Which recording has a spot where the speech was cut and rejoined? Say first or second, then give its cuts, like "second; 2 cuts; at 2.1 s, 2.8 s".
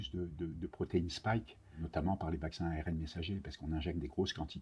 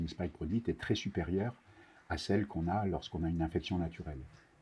first; 1 cut; at 1.7 s